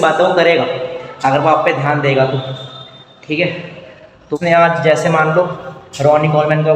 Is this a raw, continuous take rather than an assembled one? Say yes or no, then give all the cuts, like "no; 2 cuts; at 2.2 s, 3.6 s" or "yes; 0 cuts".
no; 1 cut; at 4.3 s